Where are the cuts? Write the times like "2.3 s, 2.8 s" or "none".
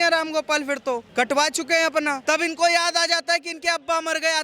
1.1 s, 2.2 s

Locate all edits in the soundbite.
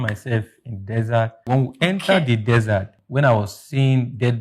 1.4 s, 3.0 s

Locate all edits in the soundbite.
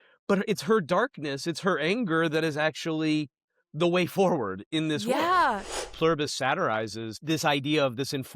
5.9 s, 7.2 s

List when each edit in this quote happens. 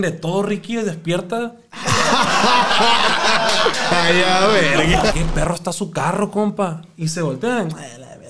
5.1 s

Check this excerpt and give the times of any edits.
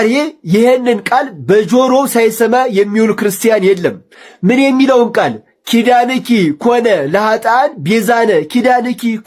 none

